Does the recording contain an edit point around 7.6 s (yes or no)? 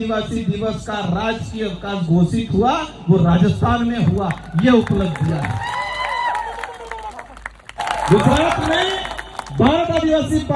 yes